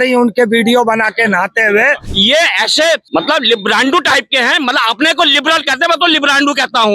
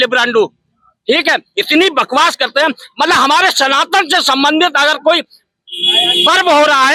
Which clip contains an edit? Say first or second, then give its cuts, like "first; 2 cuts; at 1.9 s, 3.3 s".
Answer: first; 2 cuts; at 2.1 s, 3.0 s